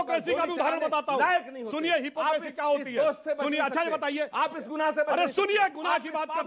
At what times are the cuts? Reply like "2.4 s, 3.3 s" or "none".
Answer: none

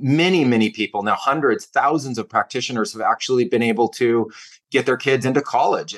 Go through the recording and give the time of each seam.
none

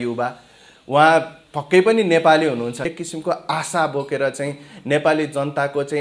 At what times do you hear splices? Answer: 2.9 s

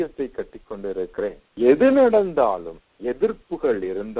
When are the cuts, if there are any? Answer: 1.4 s

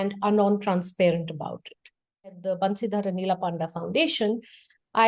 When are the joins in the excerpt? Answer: 2.4 s

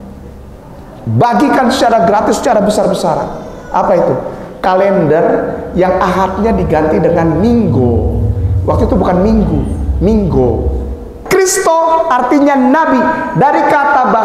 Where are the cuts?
11.2 s

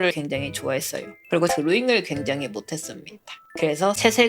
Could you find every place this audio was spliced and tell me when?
1.2 s

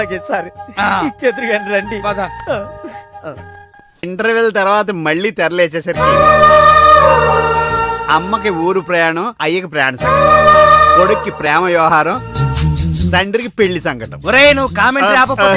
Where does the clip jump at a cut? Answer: 4.0 s

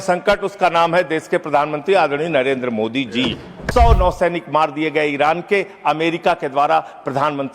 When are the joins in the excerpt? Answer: 3.5 s

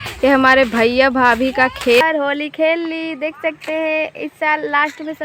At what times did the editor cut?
2.0 s

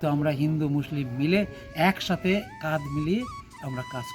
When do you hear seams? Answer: none

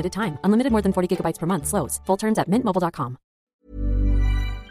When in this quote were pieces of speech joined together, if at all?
3.5 s

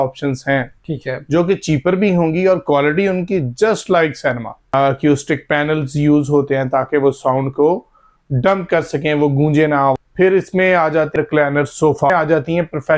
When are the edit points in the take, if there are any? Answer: 4.6 s, 9.9 s, 11.1 s, 12.1 s

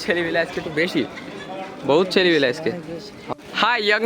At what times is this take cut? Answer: 3.1 s

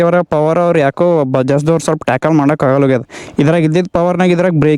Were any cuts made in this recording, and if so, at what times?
none

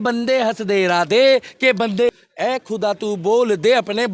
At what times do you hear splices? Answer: 2.1 s

